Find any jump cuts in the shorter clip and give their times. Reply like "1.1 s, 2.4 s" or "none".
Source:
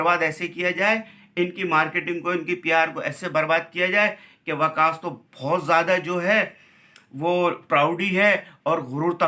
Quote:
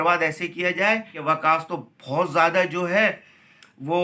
1.1 s